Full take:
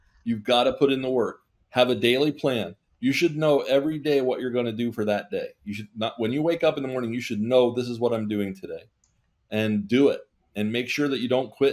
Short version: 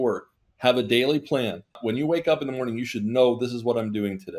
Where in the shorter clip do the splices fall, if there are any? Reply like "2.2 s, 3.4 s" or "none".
1.7 s